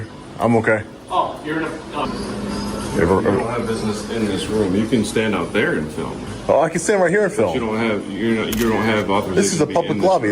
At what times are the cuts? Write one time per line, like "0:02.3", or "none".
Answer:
0:02.1